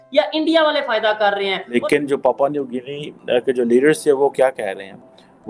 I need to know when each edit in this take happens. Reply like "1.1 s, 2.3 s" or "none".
1.7 s